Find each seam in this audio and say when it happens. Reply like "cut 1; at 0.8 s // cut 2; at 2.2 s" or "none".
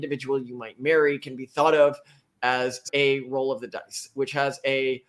cut 1; at 2.9 s